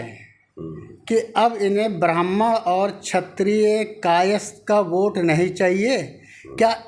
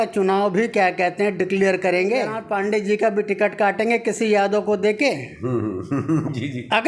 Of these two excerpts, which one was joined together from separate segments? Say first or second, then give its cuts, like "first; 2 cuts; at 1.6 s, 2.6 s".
second; 1 cut; at 2.7 s